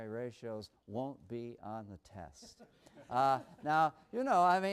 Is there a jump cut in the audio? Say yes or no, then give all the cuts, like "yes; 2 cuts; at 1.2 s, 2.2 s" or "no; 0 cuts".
yes; 1 cut; at 1.0 s